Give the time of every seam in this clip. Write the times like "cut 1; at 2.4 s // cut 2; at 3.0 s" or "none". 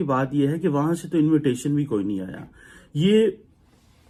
none